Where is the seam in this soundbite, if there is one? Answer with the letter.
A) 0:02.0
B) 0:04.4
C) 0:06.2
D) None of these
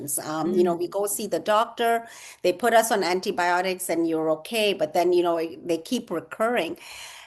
D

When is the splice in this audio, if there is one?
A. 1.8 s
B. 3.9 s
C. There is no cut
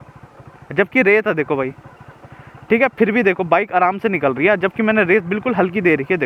C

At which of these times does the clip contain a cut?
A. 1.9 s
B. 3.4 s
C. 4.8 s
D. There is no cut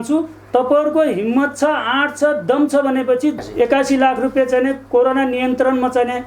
B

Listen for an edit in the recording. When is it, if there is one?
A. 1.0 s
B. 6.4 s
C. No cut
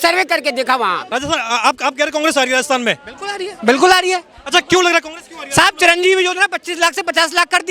A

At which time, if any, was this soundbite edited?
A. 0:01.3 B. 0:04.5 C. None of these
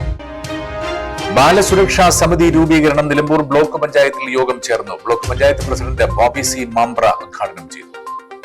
C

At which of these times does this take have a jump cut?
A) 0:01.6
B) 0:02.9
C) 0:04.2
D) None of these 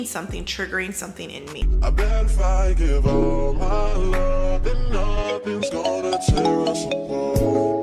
A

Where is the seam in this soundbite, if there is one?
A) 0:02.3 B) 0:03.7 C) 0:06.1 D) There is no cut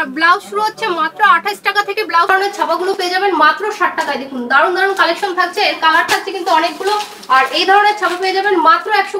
A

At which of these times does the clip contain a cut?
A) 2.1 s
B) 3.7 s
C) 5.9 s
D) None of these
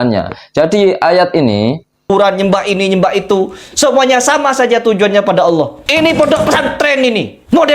A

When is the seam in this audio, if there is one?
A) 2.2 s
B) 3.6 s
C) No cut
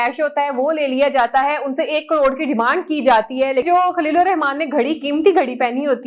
B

